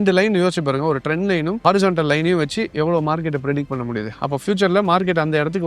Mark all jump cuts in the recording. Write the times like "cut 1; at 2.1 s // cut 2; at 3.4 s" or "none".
cut 1; at 1.6 s